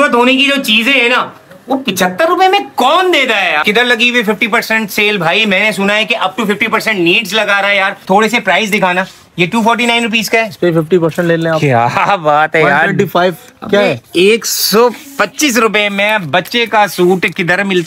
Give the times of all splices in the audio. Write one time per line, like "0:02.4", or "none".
0:03.6
0:08.0

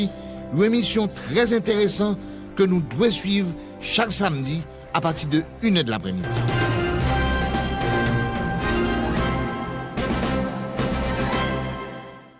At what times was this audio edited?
0:06.3

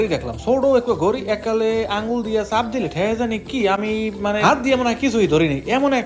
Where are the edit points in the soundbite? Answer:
none

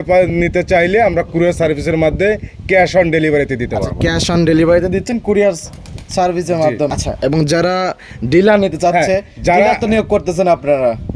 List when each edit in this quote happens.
0:06.9

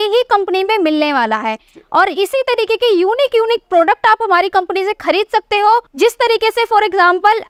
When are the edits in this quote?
none

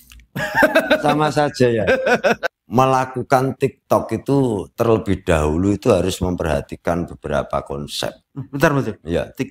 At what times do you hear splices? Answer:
0:02.4

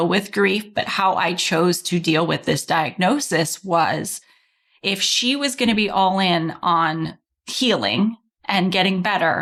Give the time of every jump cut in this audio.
none

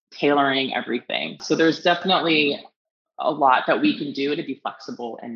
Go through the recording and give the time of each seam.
0:01.4

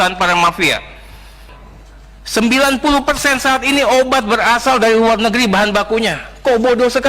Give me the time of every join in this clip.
0:01.5

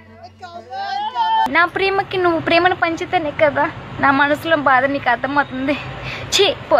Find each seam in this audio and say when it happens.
none

